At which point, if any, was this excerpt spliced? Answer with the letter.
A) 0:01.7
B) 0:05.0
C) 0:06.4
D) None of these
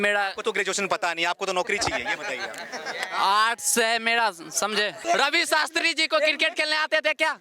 B